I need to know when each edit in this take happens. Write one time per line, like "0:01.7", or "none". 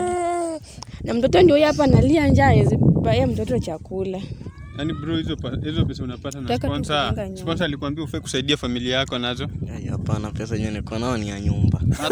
none